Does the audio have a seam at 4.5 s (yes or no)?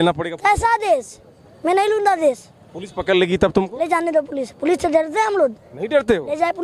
no